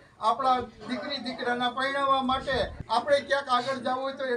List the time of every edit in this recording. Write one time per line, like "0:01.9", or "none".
0:02.8